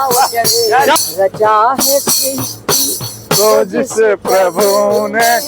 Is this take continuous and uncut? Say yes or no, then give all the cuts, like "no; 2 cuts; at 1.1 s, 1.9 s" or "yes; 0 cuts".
no; 1 cut; at 1.0 s